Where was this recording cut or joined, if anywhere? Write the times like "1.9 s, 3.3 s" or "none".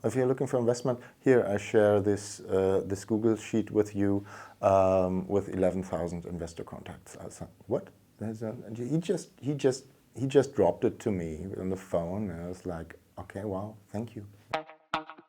14.4 s

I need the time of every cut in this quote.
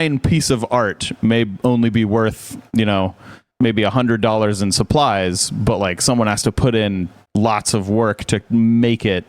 none

